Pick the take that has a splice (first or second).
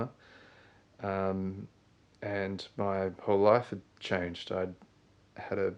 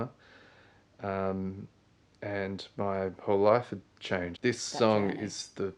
second